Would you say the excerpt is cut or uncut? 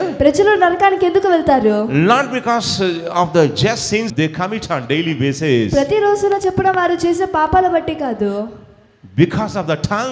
cut